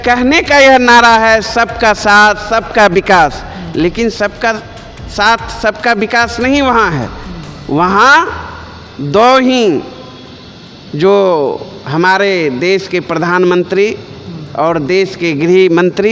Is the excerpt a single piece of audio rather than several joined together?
yes; 0 cuts

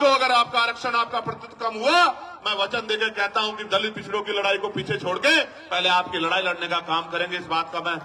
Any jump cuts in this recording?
no; 0 cuts

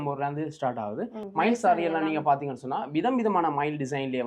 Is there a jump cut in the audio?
no; 0 cuts

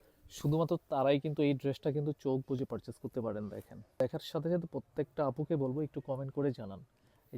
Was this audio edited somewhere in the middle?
yes; 1 cut; at 4.0 s

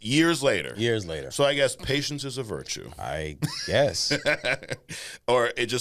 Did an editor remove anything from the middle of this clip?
no; 0 cuts

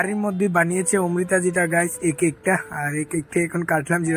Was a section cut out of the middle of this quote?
yes; 1 cut; at 1.9 s

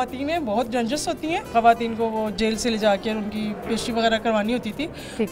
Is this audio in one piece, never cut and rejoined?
no; 1 cut; at 1.5 s

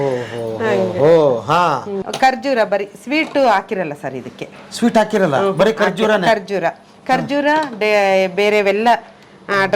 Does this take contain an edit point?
yes; 1 cut; at 1.9 s

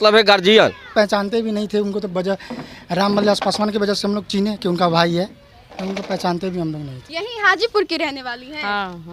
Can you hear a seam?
yes; 2 cuts; at 0.8 s, 7.0 s

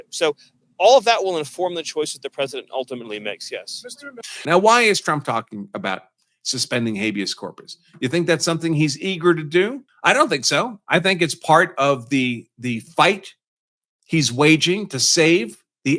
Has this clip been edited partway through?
yes; 1 cut; at 4.4 s

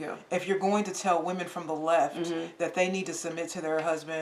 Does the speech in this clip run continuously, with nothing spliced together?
yes; 0 cuts

